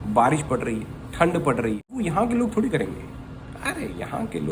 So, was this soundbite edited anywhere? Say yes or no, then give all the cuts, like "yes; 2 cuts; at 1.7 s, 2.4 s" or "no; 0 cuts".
yes; 1 cut; at 1.9 s